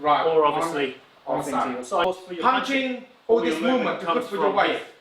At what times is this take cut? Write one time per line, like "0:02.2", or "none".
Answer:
0:02.0